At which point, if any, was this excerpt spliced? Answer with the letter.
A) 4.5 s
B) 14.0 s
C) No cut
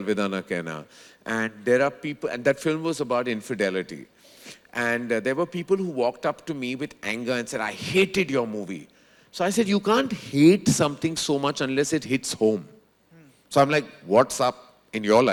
C